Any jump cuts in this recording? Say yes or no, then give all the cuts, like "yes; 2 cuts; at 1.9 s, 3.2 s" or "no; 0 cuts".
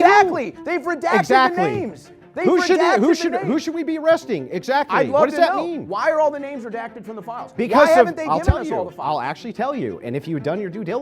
no; 0 cuts